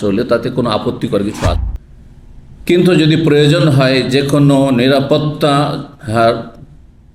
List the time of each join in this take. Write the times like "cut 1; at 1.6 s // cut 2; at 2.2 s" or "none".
cut 1; at 1.6 s